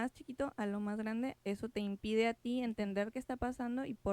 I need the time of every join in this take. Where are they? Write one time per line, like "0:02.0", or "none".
0:01.4